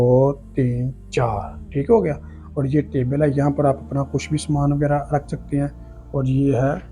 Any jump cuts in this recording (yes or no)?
no